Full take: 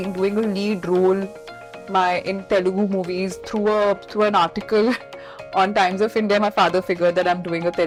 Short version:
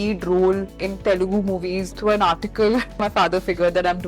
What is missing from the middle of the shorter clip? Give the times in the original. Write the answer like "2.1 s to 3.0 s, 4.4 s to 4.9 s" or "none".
1.5 s to 2.3 s, 3.4 s to 4.1 s, 5.1 s to 6.4 s

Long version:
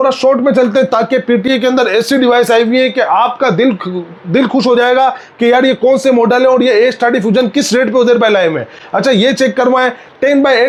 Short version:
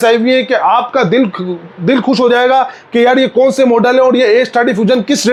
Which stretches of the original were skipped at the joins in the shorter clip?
none

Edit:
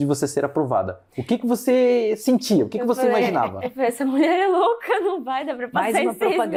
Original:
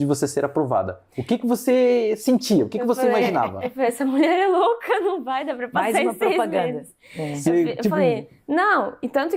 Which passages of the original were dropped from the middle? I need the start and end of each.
none

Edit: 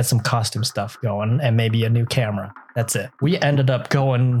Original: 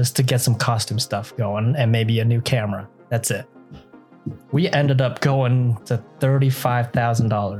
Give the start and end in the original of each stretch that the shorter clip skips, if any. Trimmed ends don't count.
3.5 s to 4.4 s

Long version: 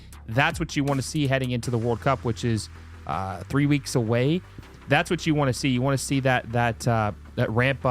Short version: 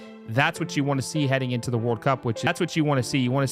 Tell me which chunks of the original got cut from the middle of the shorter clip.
2.5 s to 5.0 s

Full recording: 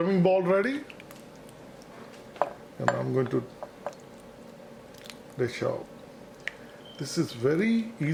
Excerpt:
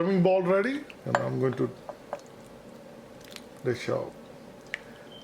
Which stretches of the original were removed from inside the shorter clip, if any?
0.9 s to 2.7 s

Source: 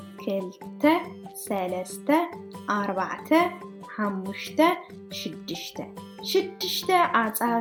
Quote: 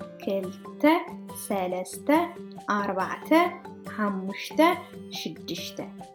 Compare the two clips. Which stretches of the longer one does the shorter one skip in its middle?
none

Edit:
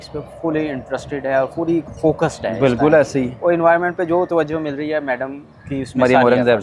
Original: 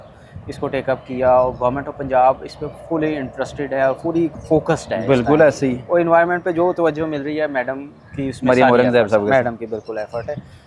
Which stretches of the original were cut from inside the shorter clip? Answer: none

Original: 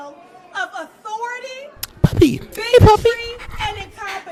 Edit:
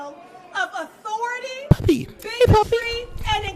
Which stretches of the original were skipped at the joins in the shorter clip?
1.6 s to 1.9 s

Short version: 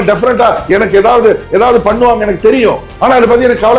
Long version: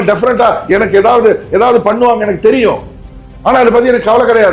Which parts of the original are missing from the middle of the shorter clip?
2.9 s to 3.3 s

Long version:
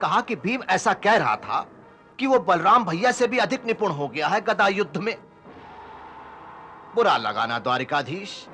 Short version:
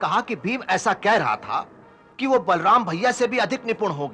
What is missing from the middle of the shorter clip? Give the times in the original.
none

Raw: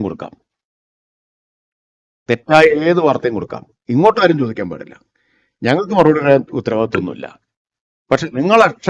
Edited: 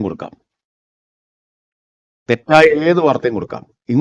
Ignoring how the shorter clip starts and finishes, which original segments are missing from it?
none

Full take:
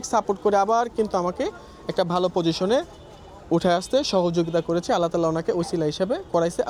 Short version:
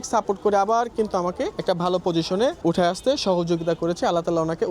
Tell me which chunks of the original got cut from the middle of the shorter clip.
1.6 s to 1.9 s, 2.9 s to 3.4 s

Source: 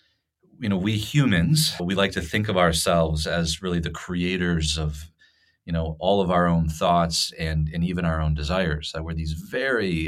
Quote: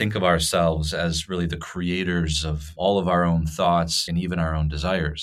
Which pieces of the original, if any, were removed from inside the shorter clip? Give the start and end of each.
5.0 s to 5.9 s, 7.3 s to 7.7 s

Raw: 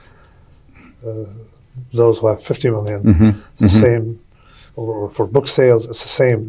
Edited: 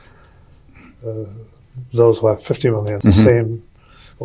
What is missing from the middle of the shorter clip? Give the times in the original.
2.9 s to 3.5 s

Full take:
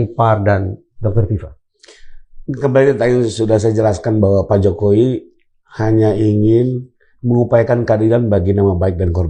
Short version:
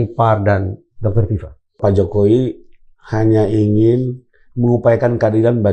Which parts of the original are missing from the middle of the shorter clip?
1.8 s to 4.5 s

